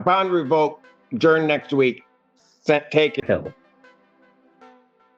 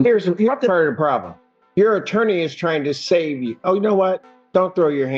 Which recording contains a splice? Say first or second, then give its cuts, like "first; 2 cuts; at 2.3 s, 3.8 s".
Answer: first; 1 cut; at 3.2 s